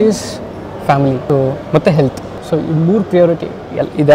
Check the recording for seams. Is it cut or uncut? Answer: cut